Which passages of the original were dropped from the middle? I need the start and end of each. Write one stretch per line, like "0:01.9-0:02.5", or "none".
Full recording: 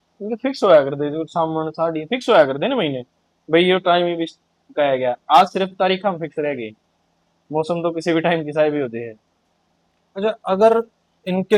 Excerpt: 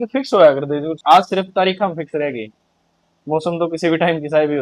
0:01.3-0:05.2